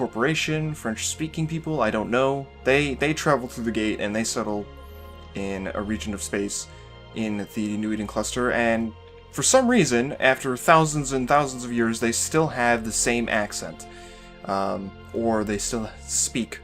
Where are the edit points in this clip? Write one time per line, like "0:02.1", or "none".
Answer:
0:07.5